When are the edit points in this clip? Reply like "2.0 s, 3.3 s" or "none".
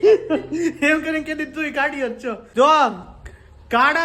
2.4 s